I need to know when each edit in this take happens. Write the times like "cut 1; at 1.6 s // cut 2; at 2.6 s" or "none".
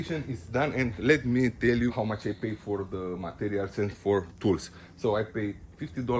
cut 1; at 1.9 s